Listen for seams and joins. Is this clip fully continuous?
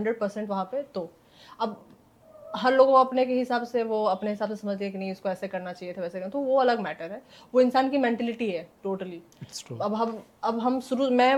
yes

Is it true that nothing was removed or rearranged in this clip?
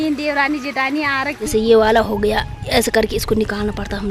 no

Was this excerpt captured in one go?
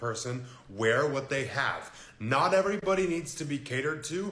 no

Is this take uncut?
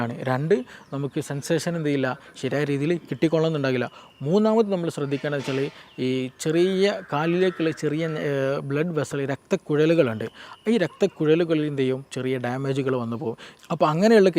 no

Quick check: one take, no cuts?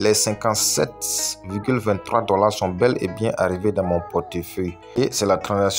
yes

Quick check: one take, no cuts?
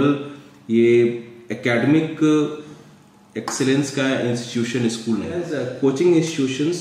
no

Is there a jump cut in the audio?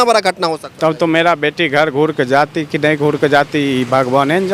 no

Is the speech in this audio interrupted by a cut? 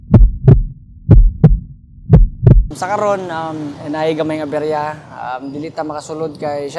yes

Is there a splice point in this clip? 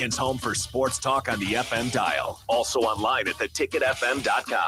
no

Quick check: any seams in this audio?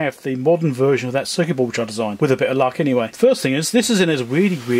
yes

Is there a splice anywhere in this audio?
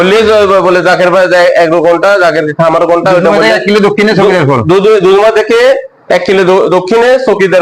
no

